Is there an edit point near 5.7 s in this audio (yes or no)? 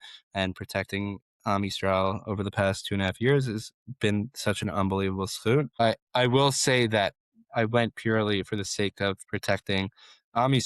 yes